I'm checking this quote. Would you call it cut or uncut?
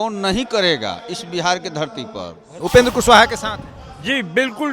cut